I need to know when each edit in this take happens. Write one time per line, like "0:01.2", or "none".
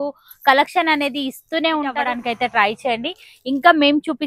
0:02.0

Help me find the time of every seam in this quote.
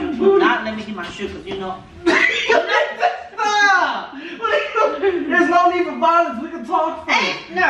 none

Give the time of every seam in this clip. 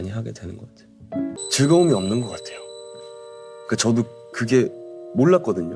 0:01.4

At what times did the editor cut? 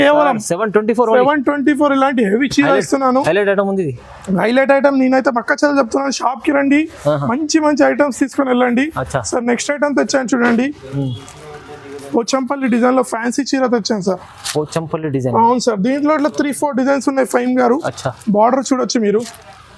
none

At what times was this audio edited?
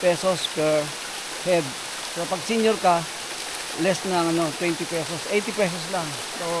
none

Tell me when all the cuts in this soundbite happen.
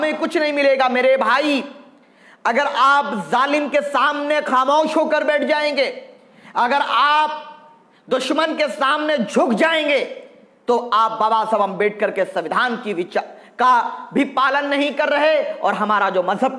none

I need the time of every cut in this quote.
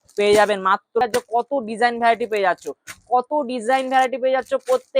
0:01.0

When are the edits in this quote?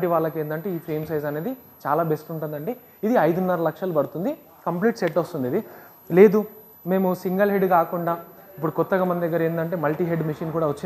none

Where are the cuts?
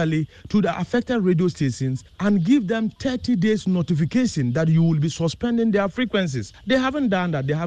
none

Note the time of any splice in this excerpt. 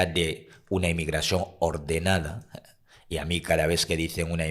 none

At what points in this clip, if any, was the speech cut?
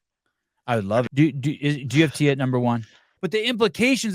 0:01.1
0:03.1

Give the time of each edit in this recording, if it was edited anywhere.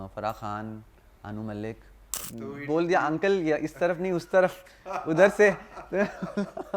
0:01.9

